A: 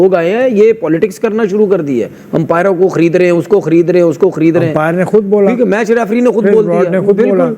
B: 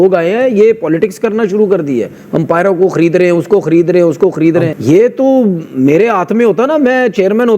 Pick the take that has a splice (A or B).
B